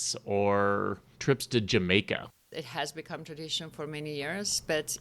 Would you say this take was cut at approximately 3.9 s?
no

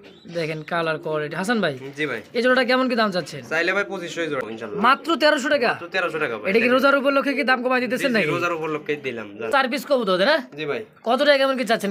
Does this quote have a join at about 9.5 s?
yes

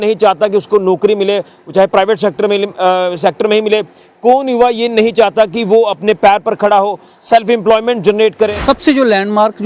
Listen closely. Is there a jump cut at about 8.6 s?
yes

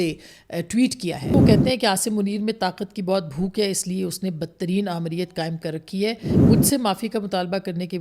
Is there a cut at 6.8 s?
no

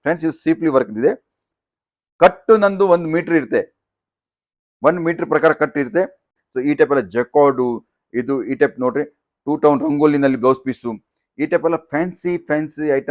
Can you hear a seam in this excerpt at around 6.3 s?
yes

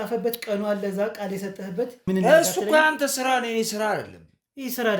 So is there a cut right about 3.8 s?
no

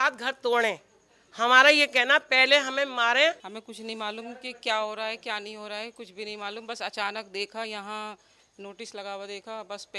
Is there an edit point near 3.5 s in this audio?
yes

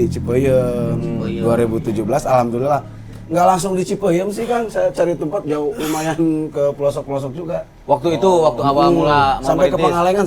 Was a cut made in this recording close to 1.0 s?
no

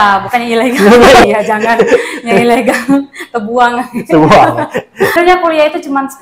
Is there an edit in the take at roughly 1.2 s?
yes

